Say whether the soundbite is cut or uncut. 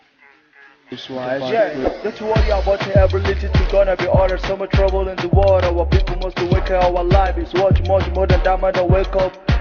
cut